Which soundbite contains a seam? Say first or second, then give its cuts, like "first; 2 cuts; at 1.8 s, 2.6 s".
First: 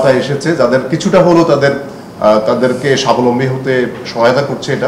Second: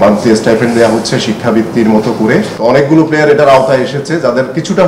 second; 1 cut; at 2.5 s